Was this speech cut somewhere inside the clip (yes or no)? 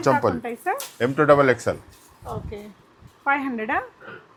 no